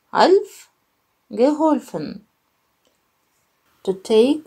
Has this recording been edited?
yes; 1 cut; at 3.4 s

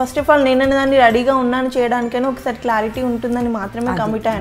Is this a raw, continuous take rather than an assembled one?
yes; 0 cuts

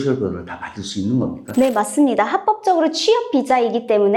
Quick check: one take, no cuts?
yes; 0 cuts

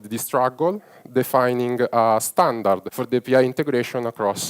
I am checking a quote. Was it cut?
yes; 1 cut; at 2.9 s

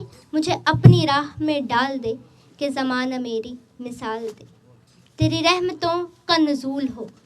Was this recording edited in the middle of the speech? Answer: no; 0 cuts

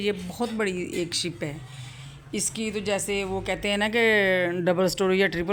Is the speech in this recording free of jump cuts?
yes; 0 cuts

